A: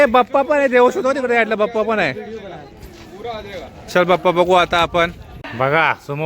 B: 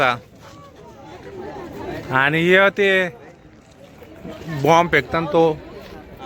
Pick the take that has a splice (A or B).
A